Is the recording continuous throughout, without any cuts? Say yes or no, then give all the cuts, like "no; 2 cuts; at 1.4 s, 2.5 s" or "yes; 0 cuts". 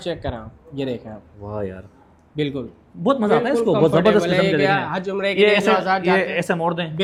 yes; 0 cuts